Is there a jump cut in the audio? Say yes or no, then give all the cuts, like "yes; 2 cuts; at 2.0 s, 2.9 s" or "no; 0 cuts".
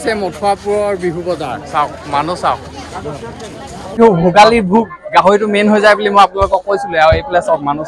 yes; 1 cut; at 4.0 s